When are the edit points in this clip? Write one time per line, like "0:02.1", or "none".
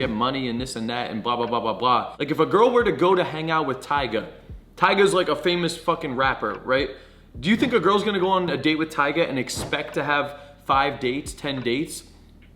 0:08.5